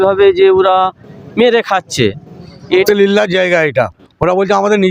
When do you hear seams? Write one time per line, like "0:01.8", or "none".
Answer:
0:02.8

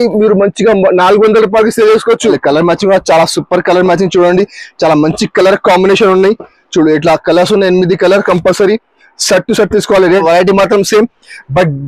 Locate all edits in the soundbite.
0:02.4
0:10.2

